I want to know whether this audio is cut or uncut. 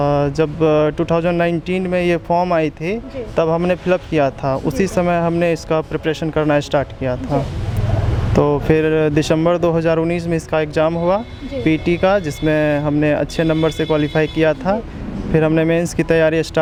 uncut